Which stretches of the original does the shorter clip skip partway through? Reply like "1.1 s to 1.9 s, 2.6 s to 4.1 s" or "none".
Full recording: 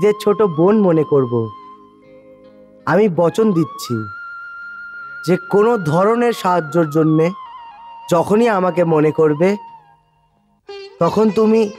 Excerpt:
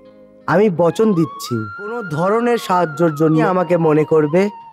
4.4 s to 5.8 s, 7.2 s to 8.5 s